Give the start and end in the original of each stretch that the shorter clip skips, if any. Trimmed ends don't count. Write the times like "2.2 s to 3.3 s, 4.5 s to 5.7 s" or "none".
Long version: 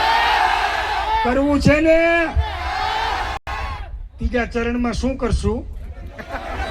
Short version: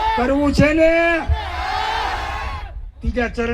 3.4 s to 3.5 s